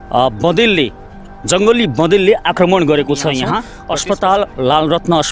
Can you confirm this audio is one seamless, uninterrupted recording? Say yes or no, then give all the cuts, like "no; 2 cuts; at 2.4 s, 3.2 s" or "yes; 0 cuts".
no; 1 cut; at 3.7 s